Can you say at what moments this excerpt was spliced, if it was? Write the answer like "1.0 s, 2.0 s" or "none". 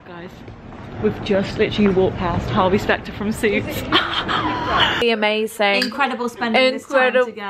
5.0 s